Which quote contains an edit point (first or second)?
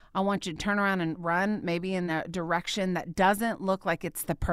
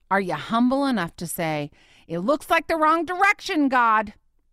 first